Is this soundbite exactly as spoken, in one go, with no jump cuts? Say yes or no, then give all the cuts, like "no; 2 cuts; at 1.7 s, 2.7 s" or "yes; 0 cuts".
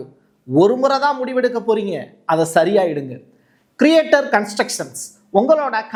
yes; 0 cuts